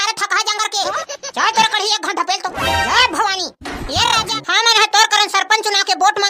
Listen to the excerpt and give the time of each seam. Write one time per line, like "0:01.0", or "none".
0:04.3